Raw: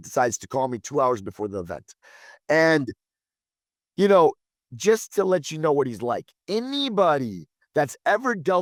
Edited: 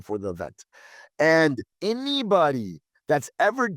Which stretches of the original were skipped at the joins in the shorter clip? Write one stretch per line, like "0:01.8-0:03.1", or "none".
0:03.0-0:06.4

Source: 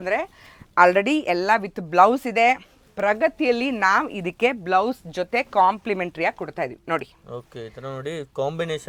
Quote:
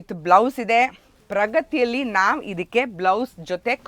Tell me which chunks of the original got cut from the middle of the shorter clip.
none

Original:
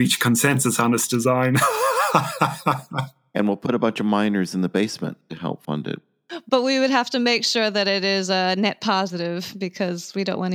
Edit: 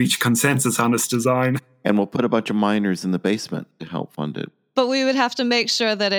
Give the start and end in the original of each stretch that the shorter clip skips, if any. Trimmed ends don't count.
0:01.6-0:03.1
0:06.1-0:06.3

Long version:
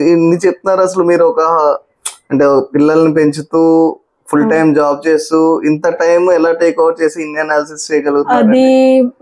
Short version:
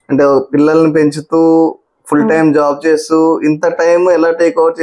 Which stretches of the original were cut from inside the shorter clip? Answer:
none

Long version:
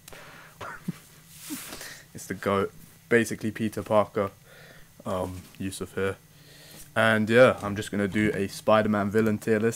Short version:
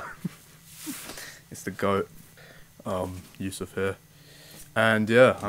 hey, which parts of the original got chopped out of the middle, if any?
0:02.9-0:04.5

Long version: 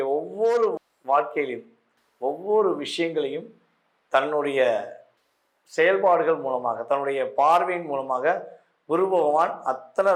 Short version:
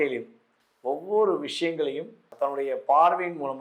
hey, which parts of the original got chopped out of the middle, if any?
0:03.7-0:06.8

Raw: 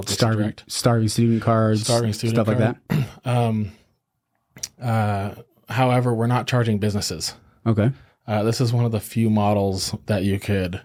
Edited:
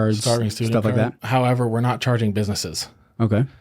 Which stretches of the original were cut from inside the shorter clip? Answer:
0:02.8-0:05.6

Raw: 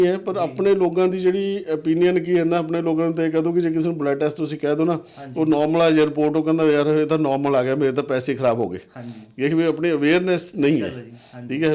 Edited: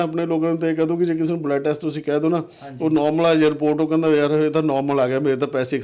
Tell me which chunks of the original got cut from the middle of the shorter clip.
none

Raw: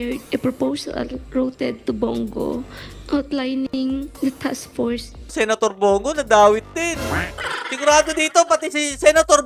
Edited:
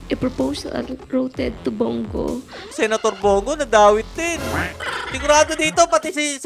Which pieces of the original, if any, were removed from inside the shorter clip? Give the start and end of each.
0:02.8-0:05.2

